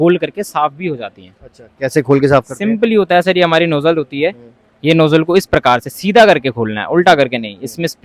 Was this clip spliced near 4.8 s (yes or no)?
no